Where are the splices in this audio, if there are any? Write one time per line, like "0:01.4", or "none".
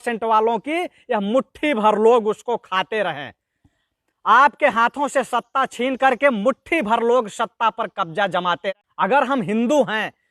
0:08.7